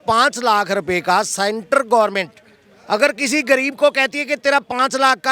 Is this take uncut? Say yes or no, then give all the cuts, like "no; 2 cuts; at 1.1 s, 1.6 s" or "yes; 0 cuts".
yes; 0 cuts